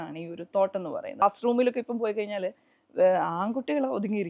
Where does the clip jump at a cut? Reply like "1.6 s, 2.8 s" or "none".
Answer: 1.2 s